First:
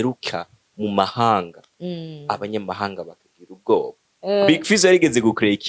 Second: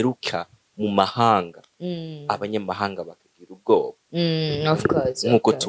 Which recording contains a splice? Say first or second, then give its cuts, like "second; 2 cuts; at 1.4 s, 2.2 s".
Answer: first; 1 cut; at 4.0 s